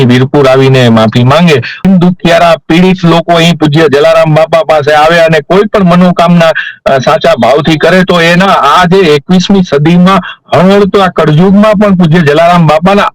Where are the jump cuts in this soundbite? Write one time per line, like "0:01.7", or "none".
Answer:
0:01.8